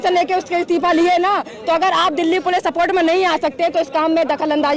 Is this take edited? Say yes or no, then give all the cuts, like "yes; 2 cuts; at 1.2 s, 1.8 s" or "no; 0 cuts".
no; 0 cuts